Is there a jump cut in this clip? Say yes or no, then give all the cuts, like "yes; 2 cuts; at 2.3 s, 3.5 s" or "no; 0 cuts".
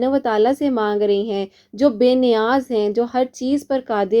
no; 0 cuts